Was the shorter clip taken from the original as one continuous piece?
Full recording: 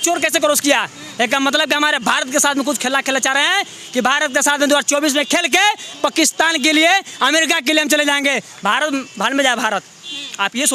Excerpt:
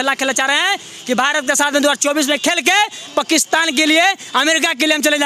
yes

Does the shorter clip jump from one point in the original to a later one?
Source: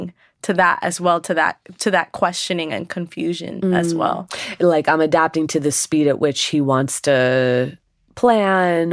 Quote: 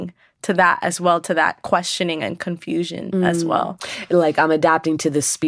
yes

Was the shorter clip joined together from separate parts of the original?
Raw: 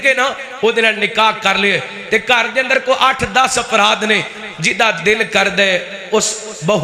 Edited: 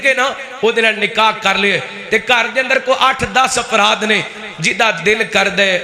no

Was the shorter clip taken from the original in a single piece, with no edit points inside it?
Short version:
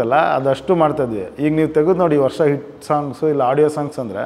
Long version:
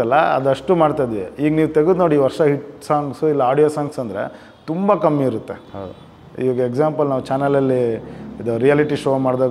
yes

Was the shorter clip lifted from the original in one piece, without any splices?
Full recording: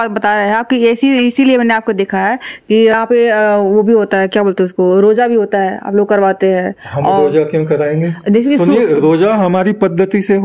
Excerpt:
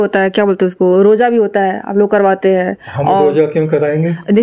yes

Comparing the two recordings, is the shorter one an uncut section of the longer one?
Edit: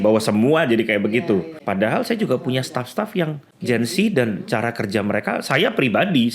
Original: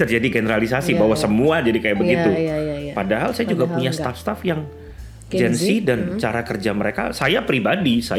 no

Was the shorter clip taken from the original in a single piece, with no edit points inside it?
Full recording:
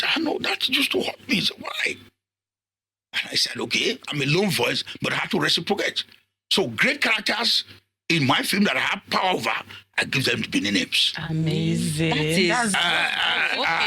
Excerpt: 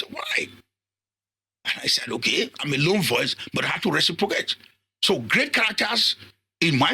yes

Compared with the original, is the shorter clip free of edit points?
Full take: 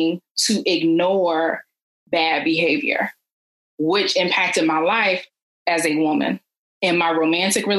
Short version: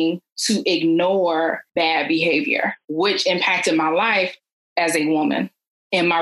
no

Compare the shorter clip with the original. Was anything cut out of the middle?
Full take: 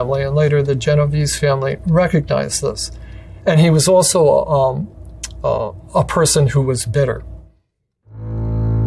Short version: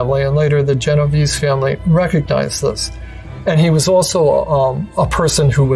yes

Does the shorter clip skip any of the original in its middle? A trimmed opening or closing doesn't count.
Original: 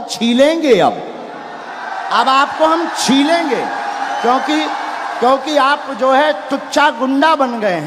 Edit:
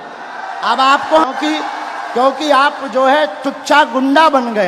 yes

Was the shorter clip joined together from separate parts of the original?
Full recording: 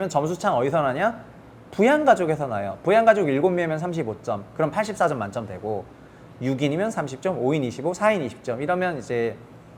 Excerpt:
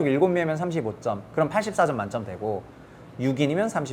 no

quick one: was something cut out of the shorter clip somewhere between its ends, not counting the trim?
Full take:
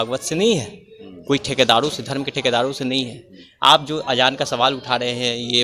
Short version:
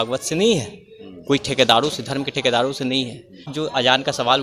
yes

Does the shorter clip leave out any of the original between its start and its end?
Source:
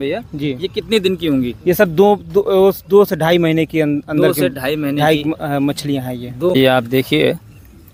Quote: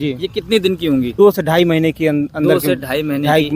yes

